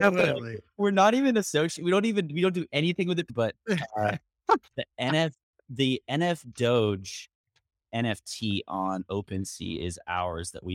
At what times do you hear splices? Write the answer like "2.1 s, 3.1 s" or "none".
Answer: 3.3 s